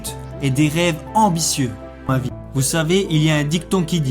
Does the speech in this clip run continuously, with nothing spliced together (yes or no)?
no